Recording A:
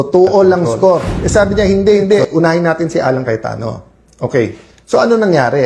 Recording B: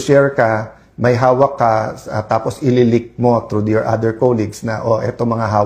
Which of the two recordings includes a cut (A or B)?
A